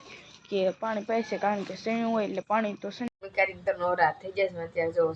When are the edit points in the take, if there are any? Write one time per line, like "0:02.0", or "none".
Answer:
0:03.1